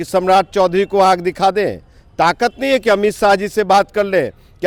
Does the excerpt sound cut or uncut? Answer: uncut